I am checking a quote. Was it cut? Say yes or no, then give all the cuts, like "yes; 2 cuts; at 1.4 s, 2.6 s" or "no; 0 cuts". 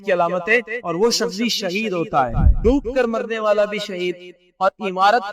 yes; 1 cut; at 2.4 s